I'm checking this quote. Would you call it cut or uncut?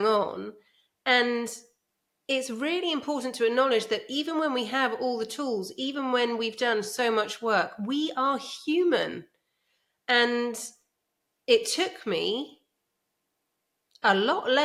uncut